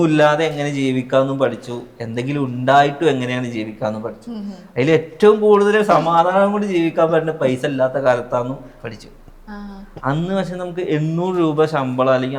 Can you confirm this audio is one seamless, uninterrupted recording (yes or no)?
yes